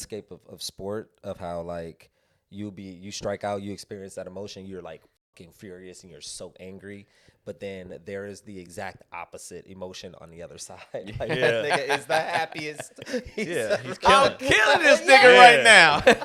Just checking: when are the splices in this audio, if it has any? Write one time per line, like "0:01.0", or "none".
none